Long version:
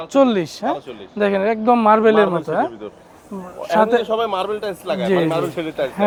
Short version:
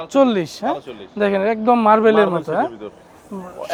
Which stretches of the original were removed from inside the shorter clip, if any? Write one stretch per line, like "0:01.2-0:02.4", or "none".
none

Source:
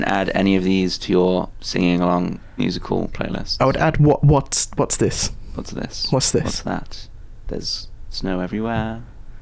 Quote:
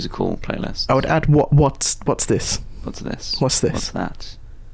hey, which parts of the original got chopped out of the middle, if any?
none

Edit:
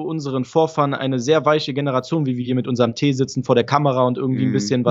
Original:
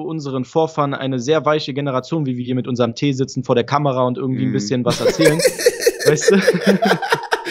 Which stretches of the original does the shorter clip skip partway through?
none

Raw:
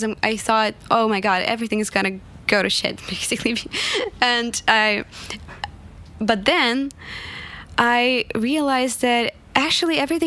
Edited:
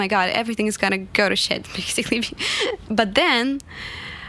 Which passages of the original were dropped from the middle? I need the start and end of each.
0:02.2-0:02.4
0:04.1-0:06.1

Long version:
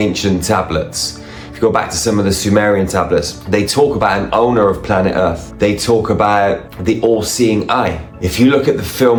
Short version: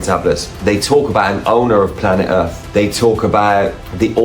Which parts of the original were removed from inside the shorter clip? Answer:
none

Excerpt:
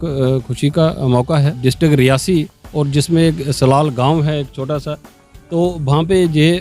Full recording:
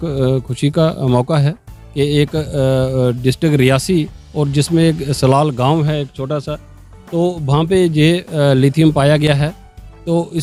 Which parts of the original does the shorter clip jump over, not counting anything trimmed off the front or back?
0:01.6-0:03.2

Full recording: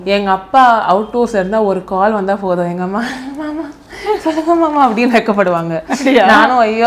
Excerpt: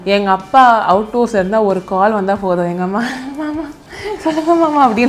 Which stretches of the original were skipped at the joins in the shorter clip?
none

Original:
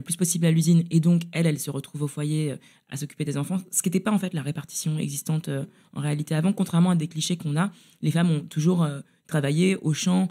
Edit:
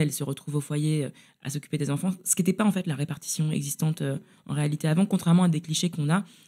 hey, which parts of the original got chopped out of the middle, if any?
none

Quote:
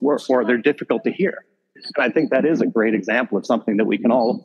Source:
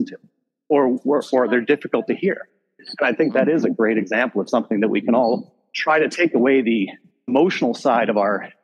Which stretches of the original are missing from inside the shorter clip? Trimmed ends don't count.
none

